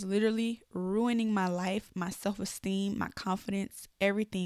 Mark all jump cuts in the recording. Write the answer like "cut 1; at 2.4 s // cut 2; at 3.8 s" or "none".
none